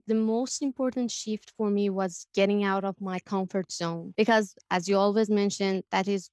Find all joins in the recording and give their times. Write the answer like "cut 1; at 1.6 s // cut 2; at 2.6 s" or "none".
cut 1; at 4.0 s